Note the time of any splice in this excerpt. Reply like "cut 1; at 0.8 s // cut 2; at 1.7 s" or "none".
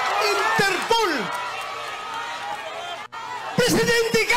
none